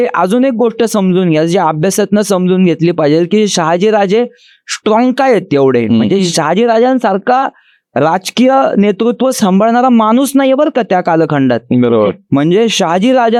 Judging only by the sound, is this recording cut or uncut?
uncut